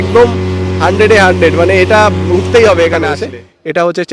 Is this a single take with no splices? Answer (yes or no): no